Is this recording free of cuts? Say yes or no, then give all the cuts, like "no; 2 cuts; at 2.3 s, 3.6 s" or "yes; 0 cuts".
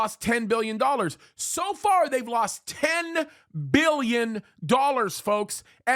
yes; 0 cuts